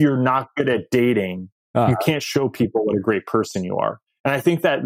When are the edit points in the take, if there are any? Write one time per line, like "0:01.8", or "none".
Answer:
none